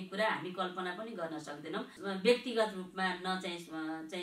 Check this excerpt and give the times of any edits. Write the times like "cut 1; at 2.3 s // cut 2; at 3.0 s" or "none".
cut 1; at 2.0 s